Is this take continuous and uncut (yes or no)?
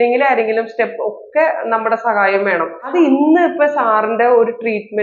no